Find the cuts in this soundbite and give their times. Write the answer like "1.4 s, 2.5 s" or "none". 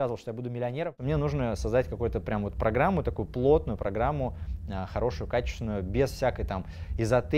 1.0 s